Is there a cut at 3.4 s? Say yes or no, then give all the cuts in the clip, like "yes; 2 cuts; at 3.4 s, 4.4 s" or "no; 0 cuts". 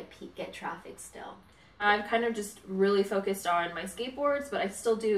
no; 1 cut; at 1.8 s